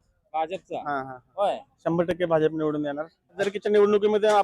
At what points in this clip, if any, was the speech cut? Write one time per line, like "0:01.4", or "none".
0:03.5